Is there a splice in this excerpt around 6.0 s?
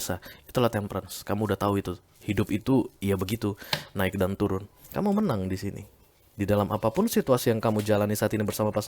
no; 1 cut; at 4.8 s

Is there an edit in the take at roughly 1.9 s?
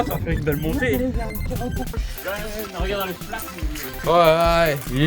yes; 1 cut; at 1.9 s

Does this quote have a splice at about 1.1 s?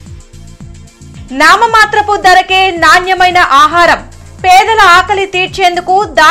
no; 0 cuts

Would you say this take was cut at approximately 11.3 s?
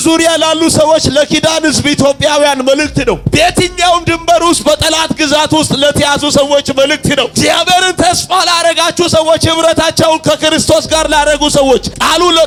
no; 0 cuts

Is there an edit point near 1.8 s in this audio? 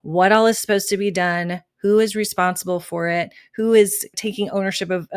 no; 1 cut; at 4.1 s

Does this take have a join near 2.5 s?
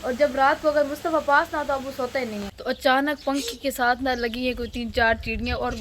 yes; 1 cut; at 2.5 s

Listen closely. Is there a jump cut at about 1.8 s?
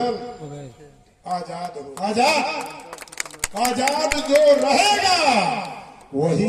yes; 1 cut; at 1.8 s

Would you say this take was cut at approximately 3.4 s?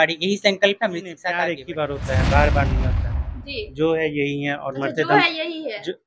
no; 1 cut; at 1.3 s

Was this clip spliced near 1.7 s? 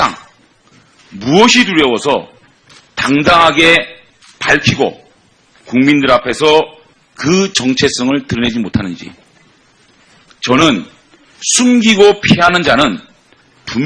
yes; 1 cut; at 1.7 s

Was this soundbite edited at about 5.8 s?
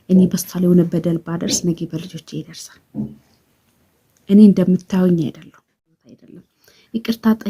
yes; 1 cut; at 5.8 s

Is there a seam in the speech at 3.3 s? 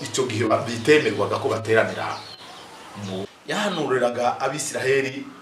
yes; 1 cut; at 3.3 s

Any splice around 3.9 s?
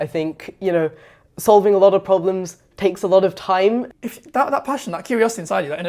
yes; 1 cut; at 3.9 s

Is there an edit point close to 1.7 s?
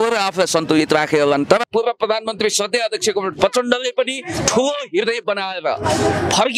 yes; 1 cut; at 1.7 s

